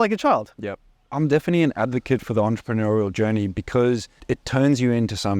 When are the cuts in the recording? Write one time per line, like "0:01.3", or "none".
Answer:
0:01.1